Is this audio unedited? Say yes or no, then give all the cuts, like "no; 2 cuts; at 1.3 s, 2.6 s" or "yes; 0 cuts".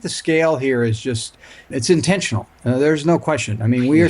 no; 1 cut; at 1.7 s